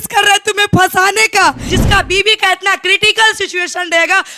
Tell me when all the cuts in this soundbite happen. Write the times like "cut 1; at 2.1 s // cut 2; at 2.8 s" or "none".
cut 1; at 1.6 s